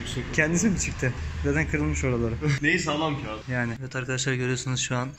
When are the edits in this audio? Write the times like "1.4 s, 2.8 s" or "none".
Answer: none